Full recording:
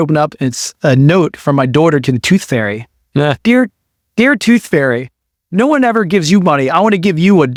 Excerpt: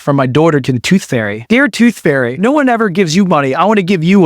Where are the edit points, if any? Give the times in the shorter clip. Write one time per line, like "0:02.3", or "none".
0:01.3
0:02.3